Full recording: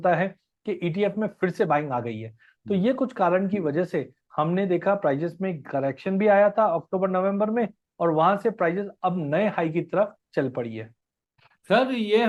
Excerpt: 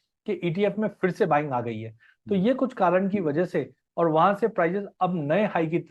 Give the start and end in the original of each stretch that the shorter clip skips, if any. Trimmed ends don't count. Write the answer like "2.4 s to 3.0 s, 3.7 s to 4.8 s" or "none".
4.2 s to 7.8 s